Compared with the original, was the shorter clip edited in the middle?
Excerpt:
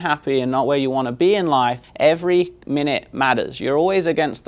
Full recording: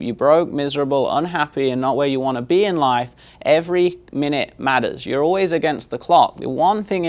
yes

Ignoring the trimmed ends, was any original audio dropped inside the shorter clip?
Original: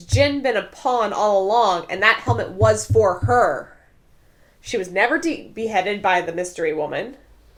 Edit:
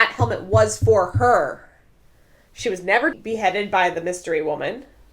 yes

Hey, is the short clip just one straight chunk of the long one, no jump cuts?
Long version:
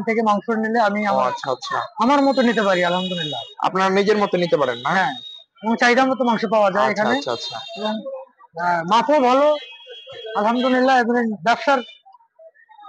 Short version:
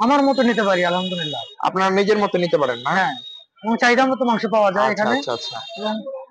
yes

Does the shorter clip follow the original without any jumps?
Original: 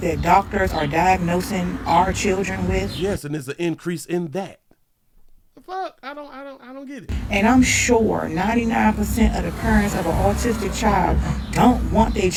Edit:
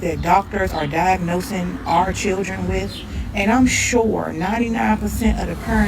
no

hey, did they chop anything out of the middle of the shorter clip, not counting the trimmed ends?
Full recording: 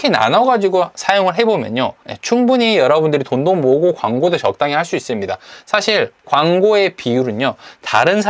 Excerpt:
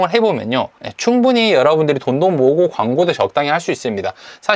no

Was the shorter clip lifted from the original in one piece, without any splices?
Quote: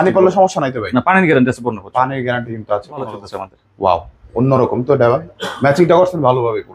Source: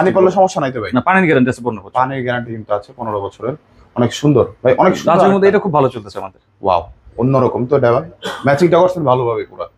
no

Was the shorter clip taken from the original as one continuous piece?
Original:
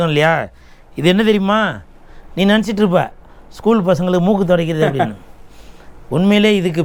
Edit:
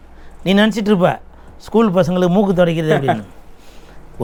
yes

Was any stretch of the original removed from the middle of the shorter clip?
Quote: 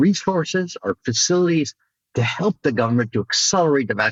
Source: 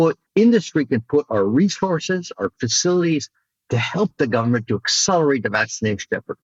no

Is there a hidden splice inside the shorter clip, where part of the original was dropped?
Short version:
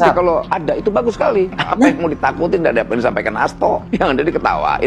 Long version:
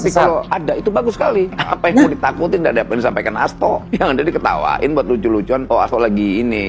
no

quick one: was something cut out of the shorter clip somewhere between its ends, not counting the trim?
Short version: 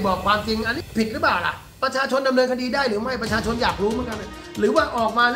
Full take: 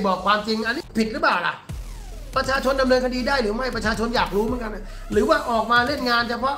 yes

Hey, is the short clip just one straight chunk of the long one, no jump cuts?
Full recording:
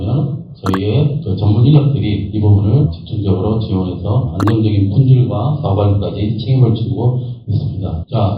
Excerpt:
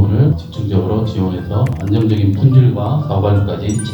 yes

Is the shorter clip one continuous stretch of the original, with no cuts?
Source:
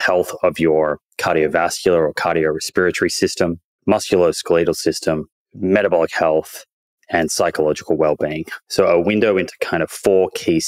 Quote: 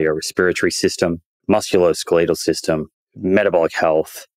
yes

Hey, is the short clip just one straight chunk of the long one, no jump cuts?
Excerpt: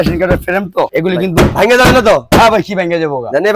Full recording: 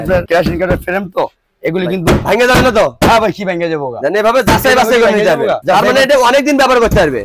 no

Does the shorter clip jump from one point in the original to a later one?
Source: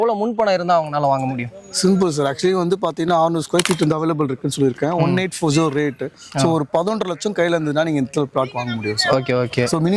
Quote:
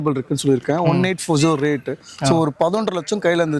no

